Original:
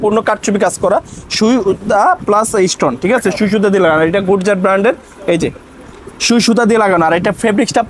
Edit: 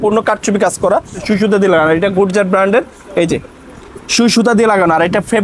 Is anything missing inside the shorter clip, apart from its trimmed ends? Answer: yes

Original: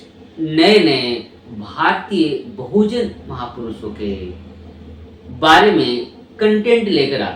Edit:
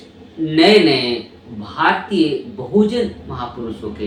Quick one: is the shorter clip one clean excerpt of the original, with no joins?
yes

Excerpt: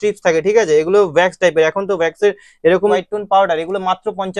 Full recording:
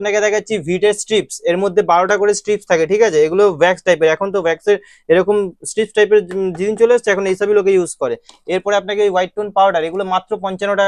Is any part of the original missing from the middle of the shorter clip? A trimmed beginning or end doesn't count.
yes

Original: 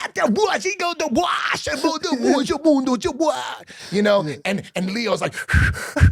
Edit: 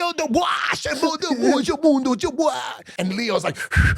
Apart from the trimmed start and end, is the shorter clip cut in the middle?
yes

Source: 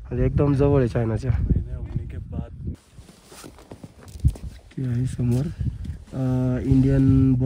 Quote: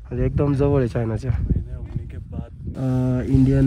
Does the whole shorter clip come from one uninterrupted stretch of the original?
no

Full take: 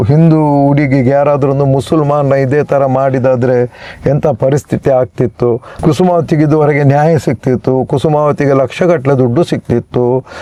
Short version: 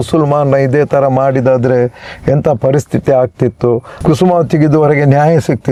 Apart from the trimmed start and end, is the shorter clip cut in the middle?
no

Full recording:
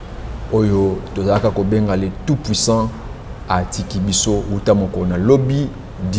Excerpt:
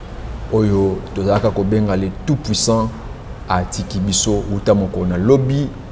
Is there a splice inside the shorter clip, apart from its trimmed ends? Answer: no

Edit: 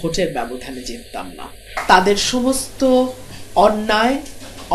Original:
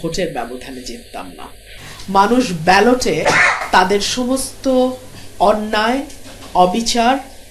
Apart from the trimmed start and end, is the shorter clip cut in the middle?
yes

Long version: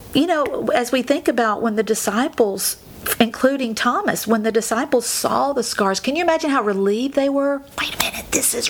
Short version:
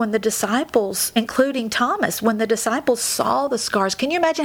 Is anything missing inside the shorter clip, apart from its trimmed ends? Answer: yes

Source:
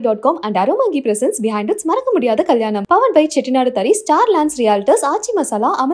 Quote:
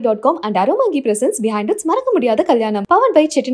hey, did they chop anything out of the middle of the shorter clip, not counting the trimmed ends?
no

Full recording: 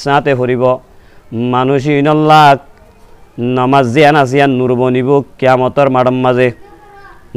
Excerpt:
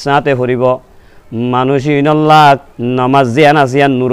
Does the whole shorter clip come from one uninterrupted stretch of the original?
no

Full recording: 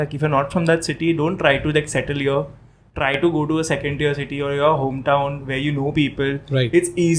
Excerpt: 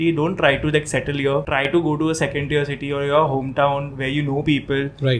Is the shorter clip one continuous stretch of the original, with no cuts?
no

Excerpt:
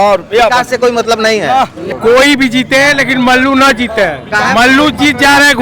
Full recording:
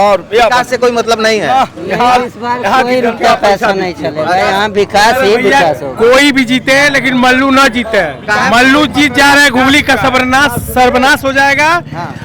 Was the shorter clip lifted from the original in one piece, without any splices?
no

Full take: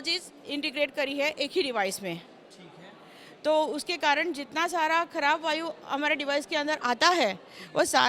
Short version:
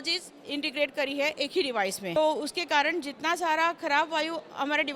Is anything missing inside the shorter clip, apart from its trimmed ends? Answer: yes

